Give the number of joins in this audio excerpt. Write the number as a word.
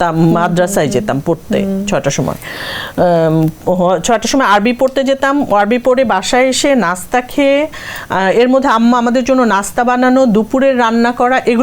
zero